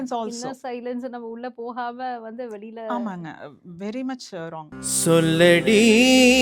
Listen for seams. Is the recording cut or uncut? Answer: cut